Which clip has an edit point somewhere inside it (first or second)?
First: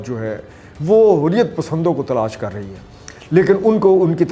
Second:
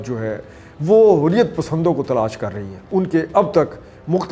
second